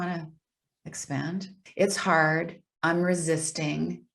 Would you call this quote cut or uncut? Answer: cut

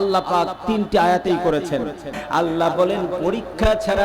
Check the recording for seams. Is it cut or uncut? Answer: cut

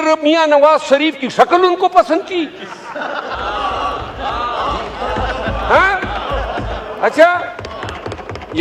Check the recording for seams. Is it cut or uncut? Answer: uncut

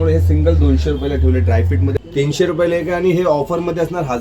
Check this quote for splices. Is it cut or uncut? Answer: cut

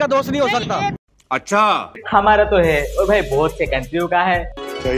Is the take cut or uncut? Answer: uncut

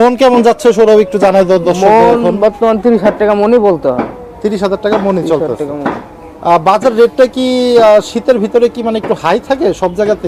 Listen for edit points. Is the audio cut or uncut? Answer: uncut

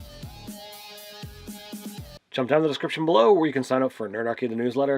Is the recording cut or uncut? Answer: cut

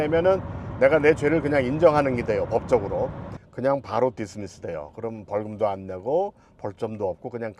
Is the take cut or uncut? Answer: cut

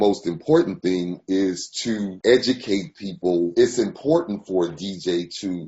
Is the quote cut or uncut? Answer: cut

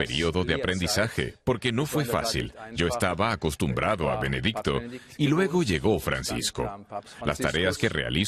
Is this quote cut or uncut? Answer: uncut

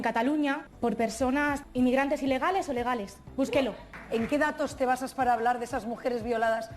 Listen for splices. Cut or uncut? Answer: cut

